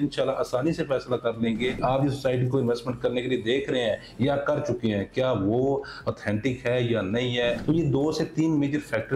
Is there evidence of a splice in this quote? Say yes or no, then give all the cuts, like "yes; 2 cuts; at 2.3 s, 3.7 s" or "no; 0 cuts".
yes; 2 cuts; at 1.8 s, 7.6 s